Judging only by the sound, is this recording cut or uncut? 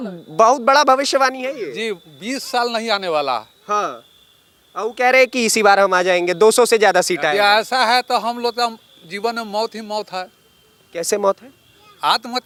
uncut